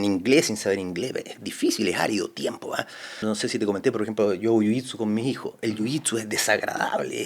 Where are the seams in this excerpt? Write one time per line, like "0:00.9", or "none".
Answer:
0:03.2